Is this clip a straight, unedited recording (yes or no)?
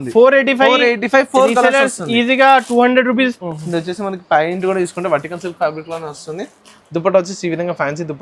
no